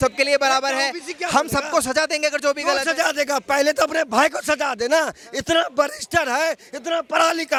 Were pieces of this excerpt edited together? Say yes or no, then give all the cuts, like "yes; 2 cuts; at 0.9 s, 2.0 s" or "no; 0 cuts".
no; 0 cuts